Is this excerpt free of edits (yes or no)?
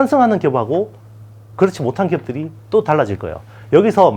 yes